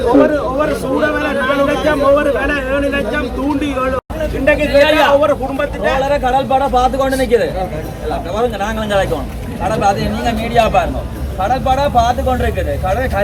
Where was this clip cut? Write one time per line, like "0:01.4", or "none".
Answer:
none